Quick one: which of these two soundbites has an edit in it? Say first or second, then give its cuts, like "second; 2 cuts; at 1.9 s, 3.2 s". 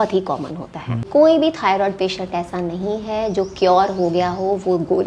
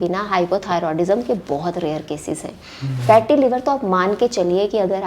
first; 1 cut; at 1.1 s